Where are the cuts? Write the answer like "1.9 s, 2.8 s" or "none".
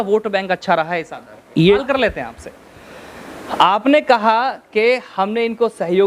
1.8 s